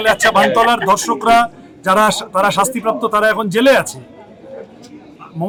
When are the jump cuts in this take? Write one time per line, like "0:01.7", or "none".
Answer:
none